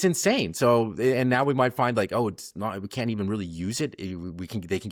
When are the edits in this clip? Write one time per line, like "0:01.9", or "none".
none